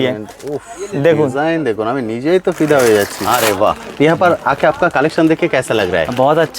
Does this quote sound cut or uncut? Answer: cut